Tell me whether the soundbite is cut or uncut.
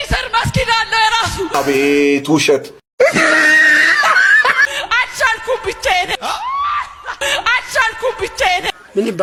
uncut